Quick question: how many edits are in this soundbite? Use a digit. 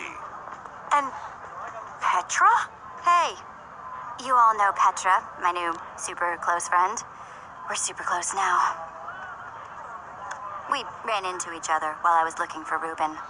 1